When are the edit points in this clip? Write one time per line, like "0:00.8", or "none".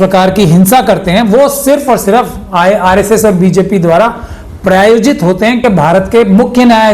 0:05.6